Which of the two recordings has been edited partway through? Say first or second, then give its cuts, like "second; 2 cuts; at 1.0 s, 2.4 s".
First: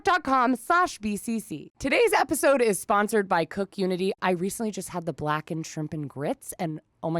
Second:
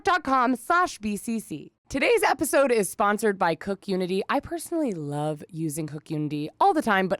first; 2 cuts; at 1.6 s, 4.2 s